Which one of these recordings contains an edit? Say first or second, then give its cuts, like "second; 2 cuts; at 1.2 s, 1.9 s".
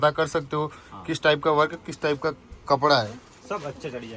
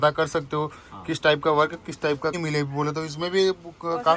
second; 1 cut; at 2.4 s